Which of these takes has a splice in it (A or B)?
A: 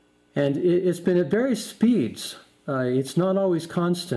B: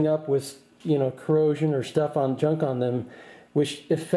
A